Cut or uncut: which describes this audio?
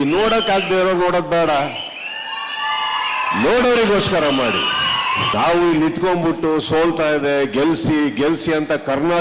cut